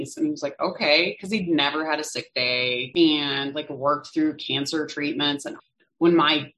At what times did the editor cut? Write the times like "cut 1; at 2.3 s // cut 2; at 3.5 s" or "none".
cut 1; at 2.9 s // cut 2; at 5.6 s